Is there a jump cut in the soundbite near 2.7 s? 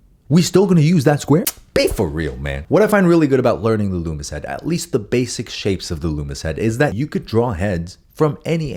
no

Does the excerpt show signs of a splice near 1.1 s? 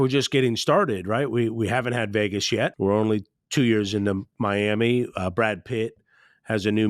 no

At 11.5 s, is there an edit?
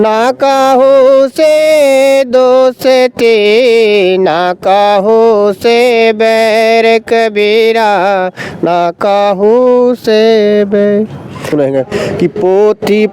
yes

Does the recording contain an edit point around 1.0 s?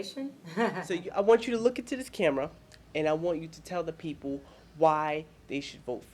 yes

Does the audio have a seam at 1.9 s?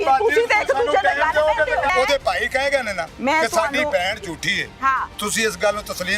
yes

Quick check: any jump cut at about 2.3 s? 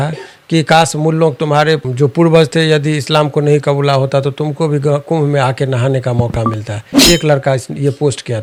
no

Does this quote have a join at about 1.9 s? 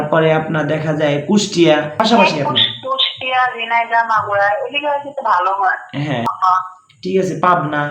yes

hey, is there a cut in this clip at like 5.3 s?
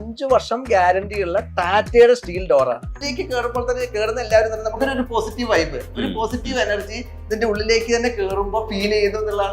no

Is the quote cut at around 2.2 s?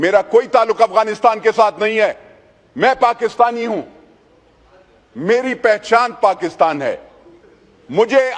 no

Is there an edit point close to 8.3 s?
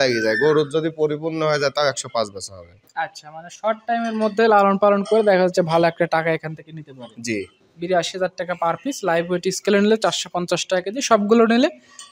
no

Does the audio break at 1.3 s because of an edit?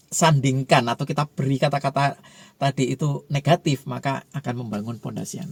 no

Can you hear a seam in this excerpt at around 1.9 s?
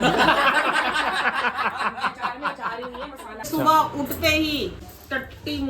no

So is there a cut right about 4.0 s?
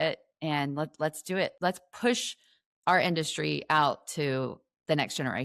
no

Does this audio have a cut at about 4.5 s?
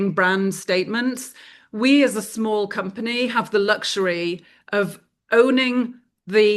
no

